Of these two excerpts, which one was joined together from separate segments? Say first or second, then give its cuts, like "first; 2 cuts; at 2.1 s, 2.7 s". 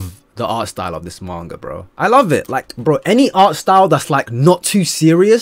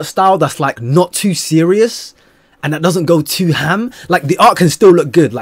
first; 1 cut; at 1.9 s